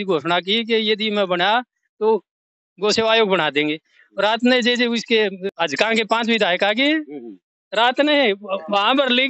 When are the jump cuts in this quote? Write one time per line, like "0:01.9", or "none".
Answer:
0:05.4